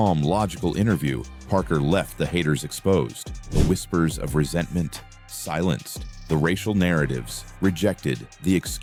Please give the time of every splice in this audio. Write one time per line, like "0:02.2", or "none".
none